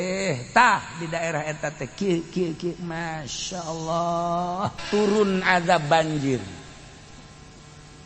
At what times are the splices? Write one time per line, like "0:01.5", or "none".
0:04.8